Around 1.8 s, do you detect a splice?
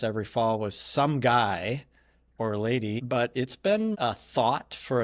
no; 1 cut; at 3.0 s

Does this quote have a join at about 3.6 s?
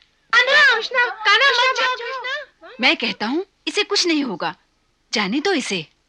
no; 0 cuts

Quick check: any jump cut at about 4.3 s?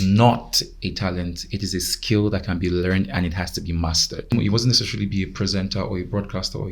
yes; 1 cut; at 4.3 s

